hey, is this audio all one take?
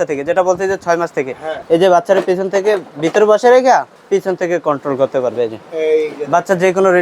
no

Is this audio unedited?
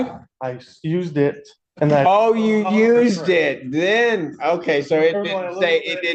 yes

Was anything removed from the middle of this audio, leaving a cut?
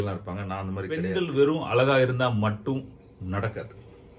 yes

